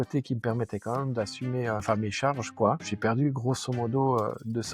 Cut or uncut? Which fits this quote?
cut